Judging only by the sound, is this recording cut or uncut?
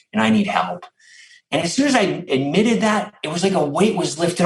cut